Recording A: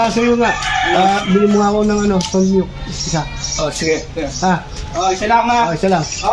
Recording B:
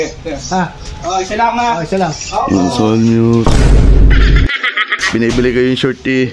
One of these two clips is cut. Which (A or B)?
B